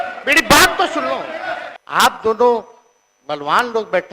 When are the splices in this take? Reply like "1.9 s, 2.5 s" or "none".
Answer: 1.7 s